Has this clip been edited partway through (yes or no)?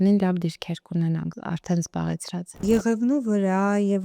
yes